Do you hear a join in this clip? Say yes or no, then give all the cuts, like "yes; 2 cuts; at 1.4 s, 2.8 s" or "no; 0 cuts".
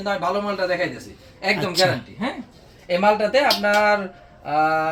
no; 0 cuts